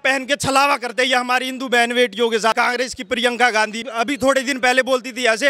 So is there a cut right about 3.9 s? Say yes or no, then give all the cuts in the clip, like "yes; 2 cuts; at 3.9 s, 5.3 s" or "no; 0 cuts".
yes; 2 cuts; at 2.5 s, 3.9 s